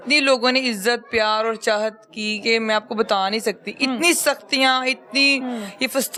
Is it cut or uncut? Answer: uncut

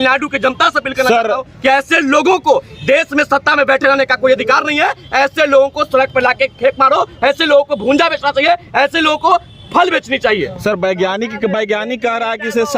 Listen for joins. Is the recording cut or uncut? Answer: uncut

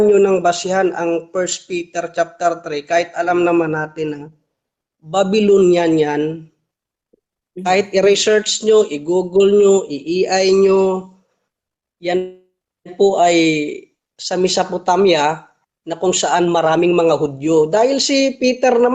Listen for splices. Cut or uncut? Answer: uncut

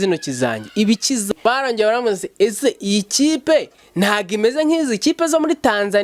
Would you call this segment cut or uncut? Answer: cut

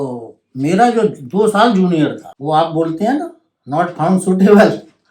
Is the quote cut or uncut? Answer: cut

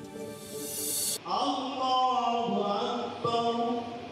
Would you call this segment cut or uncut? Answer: cut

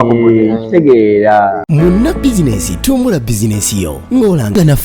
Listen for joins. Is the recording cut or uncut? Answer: cut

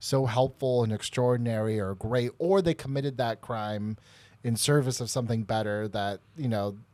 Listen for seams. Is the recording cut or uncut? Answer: uncut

